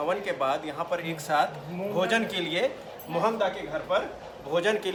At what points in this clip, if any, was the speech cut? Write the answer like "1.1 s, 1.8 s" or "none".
none